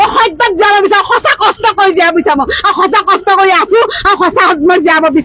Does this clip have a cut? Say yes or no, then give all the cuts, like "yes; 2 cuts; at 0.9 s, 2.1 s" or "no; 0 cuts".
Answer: no; 0 cuts